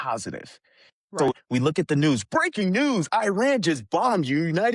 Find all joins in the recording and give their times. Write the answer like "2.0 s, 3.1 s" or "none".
1.3 s